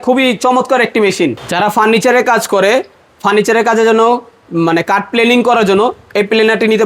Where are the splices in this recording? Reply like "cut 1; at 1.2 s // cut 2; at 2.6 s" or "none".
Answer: cut 1; at 1.4 s